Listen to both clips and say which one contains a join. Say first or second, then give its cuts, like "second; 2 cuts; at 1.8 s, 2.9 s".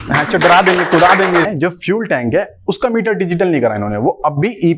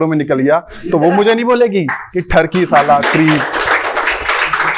first; 1 cut; at 1.5 s